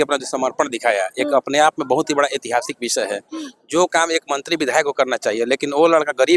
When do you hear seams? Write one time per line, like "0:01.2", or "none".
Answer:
none